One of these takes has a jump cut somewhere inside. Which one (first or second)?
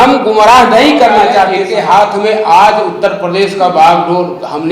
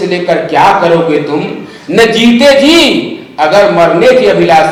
first